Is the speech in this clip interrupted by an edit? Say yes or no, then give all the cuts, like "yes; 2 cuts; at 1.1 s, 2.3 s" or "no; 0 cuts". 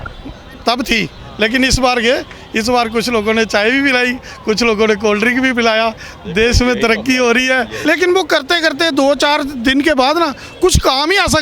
yes; 1 cut; at 7.7 s